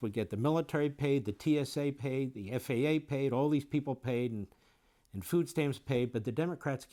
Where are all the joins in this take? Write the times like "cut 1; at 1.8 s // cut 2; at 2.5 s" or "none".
none